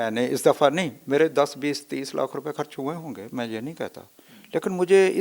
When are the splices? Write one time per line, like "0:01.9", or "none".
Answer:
none